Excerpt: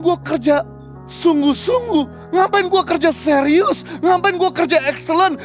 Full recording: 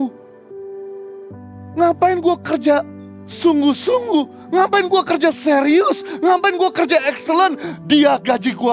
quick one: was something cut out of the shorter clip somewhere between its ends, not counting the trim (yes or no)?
no